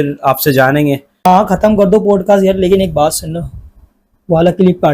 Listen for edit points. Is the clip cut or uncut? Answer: uncut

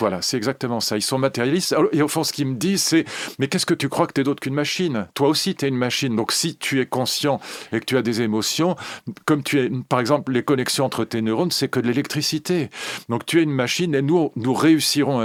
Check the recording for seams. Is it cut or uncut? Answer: uncut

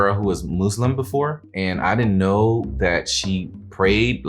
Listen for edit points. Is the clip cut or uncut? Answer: cut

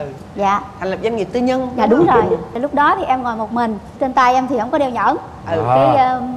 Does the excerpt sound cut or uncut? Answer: cut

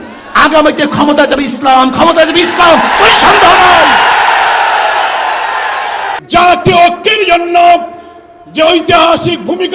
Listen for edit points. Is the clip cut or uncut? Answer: cut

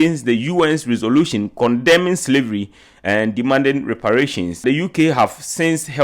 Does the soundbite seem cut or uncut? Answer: cut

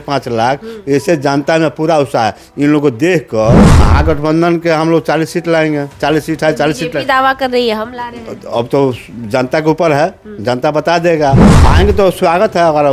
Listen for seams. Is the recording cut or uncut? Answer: cut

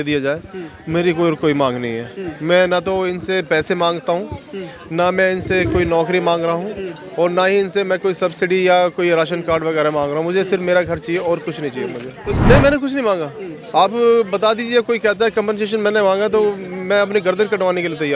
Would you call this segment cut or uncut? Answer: cut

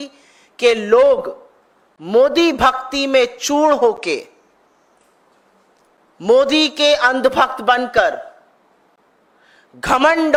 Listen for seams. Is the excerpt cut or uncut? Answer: uncut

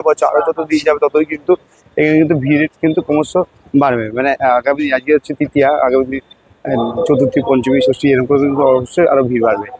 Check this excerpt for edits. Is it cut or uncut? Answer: uncut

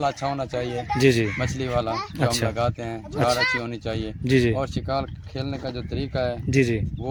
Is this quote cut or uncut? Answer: uncut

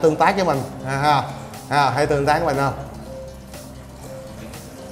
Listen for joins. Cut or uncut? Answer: uncut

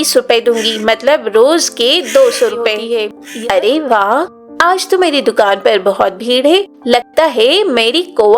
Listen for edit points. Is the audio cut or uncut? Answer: cut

